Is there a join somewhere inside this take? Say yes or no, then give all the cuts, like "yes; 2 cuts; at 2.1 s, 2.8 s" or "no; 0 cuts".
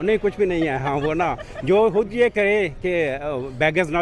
no; 0 cuts